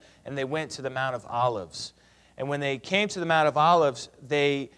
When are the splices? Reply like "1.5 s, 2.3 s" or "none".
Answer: 2.3 s